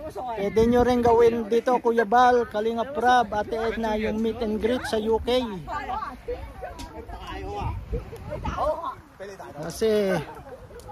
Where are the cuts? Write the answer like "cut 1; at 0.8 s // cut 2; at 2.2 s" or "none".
none